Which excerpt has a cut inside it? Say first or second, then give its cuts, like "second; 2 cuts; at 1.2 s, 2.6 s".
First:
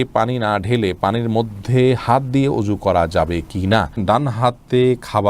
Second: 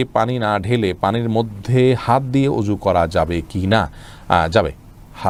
first; 1 cut; at 4.0 s